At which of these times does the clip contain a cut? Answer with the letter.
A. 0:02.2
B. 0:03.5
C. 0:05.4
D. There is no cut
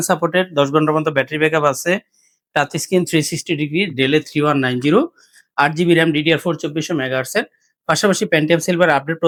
D